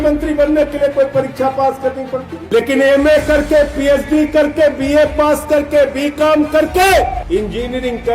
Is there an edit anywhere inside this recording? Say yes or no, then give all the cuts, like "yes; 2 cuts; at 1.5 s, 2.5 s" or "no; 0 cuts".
yes; 2 cuts; at 2.3 s, 7.2 s